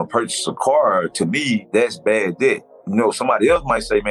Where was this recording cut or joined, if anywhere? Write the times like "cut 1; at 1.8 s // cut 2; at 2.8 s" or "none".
cut 1; at 1.7 s